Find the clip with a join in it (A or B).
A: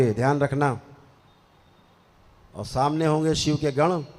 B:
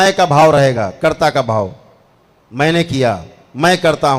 A